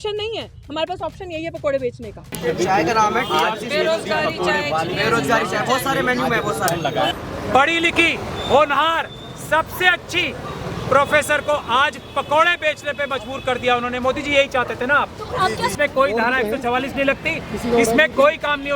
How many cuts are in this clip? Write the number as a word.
two